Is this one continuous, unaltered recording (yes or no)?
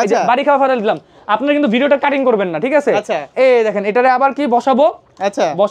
yes